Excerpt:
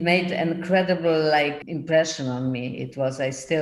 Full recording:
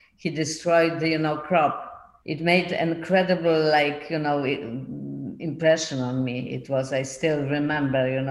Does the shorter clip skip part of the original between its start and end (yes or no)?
yes